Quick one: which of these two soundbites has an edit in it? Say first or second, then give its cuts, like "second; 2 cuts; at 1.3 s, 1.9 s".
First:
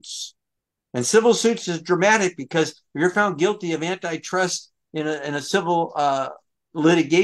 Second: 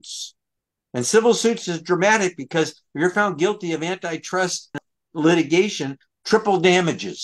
second; 1 cut; at 4.8 s